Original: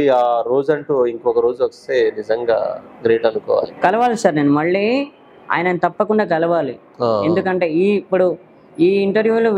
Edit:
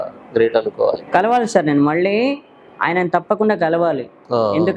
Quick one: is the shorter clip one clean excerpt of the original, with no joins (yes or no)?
yes